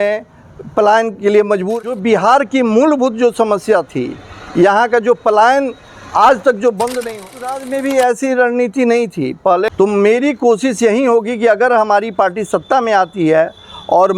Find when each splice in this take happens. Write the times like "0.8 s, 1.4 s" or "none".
1.8 s, 7.3 s, 9.7 s